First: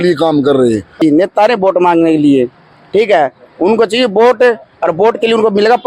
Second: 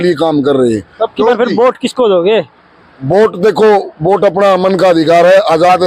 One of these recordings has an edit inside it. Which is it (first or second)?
first